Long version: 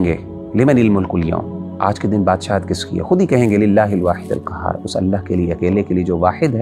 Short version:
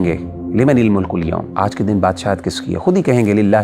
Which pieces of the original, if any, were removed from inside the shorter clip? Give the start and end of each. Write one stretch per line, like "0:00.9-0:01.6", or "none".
0:01.5-0:01.7